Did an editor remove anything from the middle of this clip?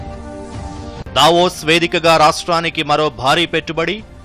yes; 1 cut; at 1.0 s

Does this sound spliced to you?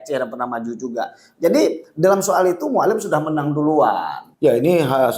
yes; 1 cut; at 4.2 s

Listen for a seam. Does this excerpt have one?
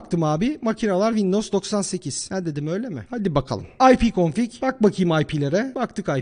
no; 0 cuts

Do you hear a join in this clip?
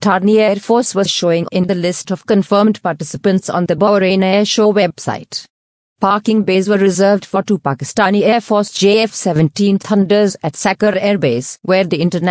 no; 0 cuts

